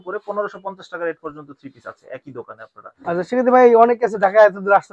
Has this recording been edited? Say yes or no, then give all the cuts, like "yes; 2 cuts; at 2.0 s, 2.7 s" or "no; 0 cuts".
no; 0 cuts